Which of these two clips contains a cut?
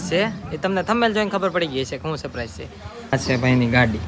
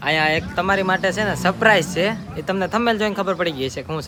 first; 1 cut; at 3.2 s

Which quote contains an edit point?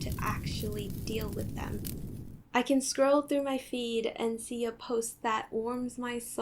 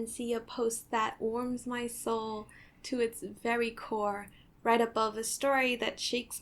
first; 1 cut; at 2.3 s

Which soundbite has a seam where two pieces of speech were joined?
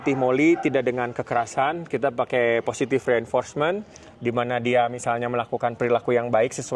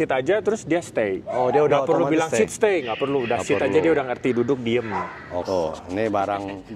second; 1 cut; at 5.4 s

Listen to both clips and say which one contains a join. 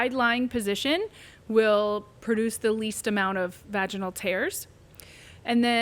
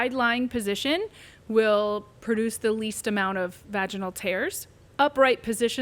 second; 1 cut; at 4.8 s

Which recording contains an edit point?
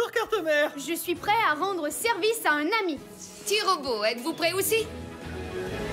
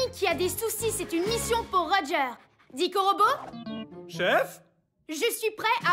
first; 1 cut; at 4.9 s

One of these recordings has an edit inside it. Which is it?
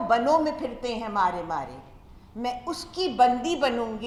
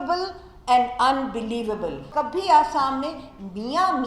second; 1 cut; at 2.1 s

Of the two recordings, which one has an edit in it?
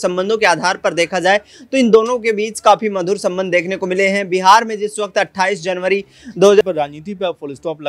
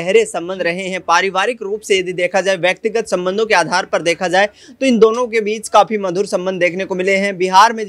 first; 1 cut; at 6.6 s

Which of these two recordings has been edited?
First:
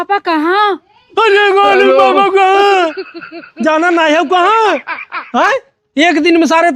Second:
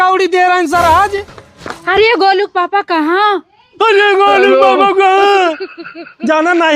second; 1 cut; at 1.3 s

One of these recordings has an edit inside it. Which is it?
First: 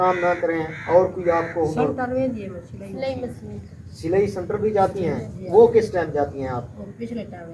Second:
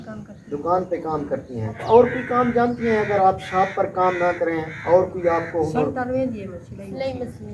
second; 1 cut; at 1.8 s

